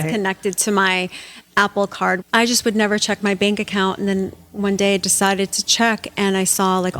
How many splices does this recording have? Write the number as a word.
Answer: one